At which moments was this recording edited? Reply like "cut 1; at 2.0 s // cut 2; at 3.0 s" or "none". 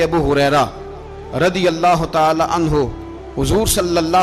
none